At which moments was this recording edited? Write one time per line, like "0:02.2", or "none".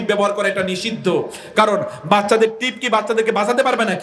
none